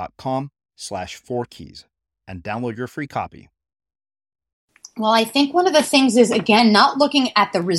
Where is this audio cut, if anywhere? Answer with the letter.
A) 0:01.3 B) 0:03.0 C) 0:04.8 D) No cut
C